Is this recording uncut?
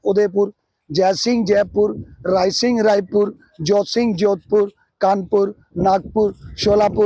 yes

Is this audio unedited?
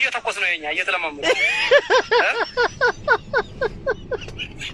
yes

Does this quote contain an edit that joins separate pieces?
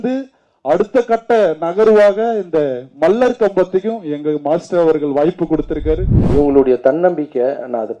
yes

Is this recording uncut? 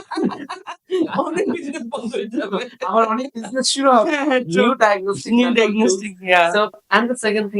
yes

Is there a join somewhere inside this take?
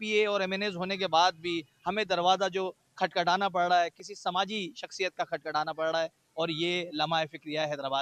no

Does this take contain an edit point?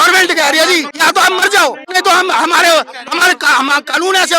yes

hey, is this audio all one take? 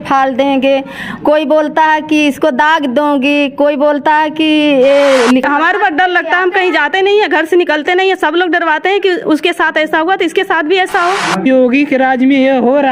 no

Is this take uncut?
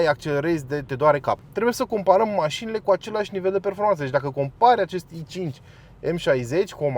no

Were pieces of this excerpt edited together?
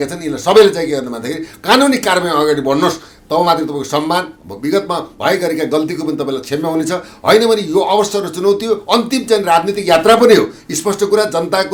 no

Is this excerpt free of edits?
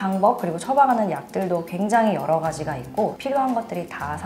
yes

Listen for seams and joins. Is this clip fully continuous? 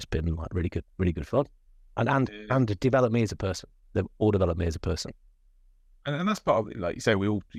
yes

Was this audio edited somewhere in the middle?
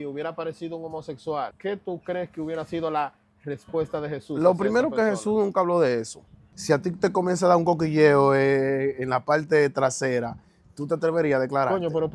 yes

